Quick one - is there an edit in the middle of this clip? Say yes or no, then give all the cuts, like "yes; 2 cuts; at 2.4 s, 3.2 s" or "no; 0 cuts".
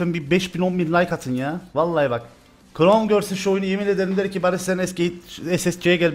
no; 0 cuts